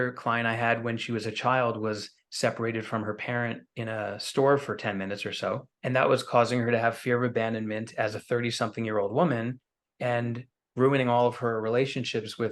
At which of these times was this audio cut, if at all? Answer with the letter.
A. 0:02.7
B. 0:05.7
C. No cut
B